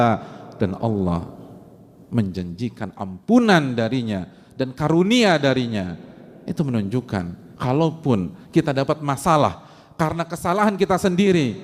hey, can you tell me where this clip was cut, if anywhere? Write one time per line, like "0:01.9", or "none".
none